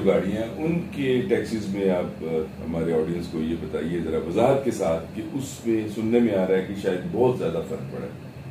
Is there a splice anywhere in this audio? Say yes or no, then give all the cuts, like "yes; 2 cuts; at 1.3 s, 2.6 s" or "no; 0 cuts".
no; 0 cuts